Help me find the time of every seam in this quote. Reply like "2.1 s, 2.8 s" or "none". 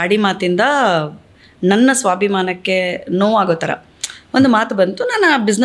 none

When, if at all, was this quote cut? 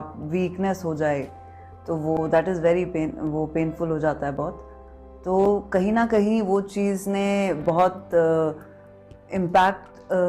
none

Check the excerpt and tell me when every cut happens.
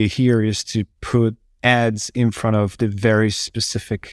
1.0 s

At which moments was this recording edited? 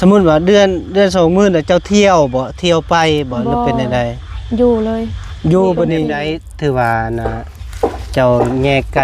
6.4 s

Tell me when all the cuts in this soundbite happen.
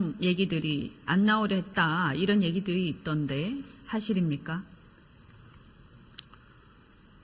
2.5 s

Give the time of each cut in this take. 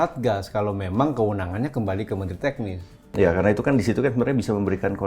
3.0 s

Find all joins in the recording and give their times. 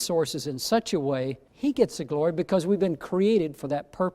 1.4 s

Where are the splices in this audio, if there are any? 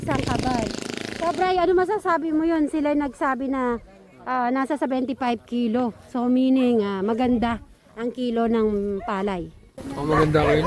none

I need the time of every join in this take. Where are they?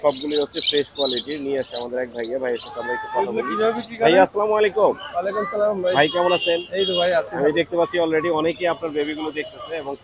none

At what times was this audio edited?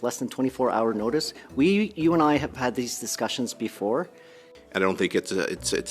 4.5 s

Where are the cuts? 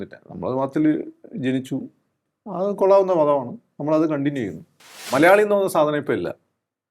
5.0 s

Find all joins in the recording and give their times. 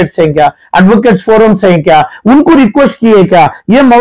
none

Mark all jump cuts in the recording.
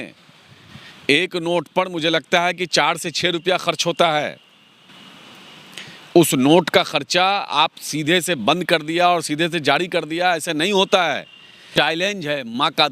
11.6 s

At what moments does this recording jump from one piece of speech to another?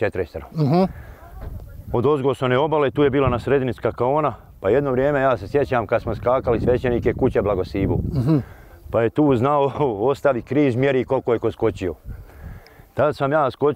none

